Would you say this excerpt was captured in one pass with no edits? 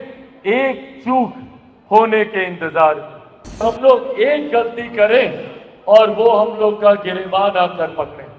no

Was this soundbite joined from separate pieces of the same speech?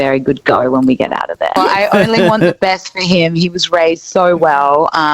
yes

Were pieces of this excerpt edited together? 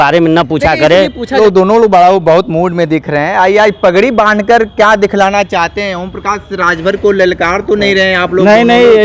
yes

